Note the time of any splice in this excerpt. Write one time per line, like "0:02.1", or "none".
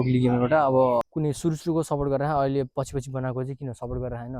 0:01.0